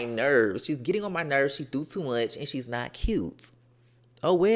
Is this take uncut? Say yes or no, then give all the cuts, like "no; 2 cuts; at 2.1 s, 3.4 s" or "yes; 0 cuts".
yes; 0 cuts